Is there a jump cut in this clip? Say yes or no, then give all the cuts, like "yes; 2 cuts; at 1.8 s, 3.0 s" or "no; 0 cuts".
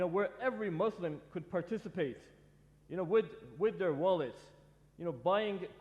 no; 0 cuts